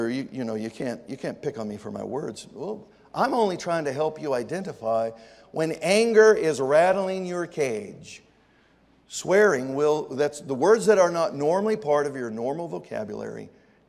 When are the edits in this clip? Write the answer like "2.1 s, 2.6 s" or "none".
none